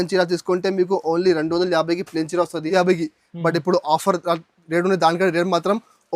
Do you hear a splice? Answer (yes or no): yes